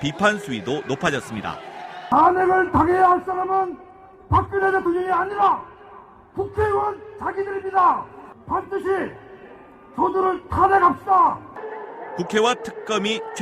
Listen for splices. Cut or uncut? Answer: uncut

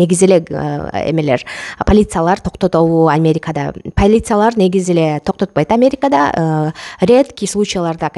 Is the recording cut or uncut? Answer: uncut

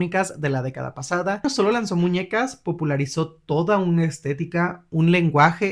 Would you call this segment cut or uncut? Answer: cut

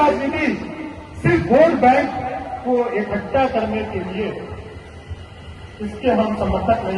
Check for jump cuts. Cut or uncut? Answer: uncut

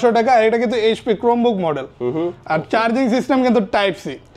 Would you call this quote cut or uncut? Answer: uncut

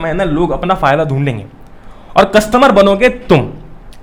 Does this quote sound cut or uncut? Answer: uncut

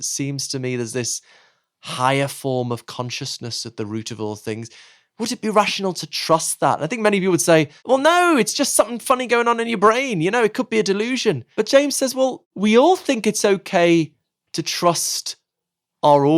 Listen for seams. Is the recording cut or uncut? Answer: cut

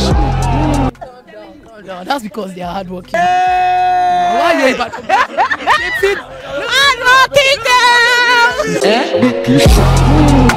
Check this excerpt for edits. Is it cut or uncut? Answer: uncut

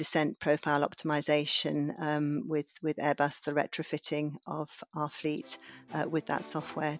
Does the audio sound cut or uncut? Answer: uncut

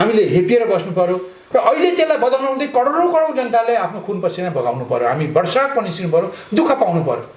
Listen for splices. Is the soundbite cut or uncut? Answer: uncut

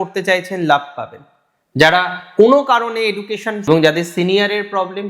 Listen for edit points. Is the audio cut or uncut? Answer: cut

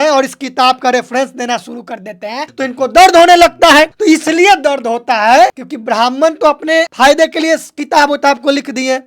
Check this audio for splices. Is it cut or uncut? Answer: cut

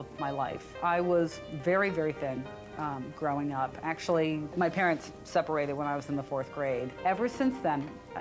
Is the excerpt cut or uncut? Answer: uncut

